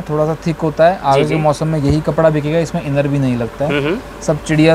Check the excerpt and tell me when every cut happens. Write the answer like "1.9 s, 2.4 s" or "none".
none